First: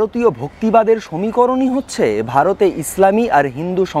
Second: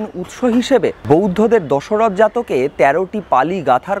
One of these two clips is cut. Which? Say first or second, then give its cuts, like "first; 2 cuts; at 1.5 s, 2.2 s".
second; 1 cut; at 1.0 s